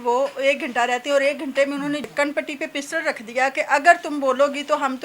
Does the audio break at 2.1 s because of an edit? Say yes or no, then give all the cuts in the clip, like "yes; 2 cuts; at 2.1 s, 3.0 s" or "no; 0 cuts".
yes; 1 cut; at 2.1 s